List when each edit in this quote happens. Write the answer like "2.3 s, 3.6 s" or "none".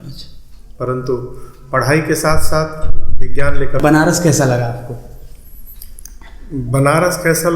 3.8 s